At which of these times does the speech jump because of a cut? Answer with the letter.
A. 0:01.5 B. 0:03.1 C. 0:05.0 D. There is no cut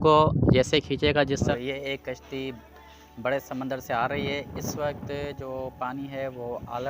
A